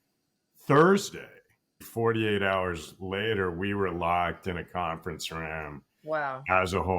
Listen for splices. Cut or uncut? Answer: cut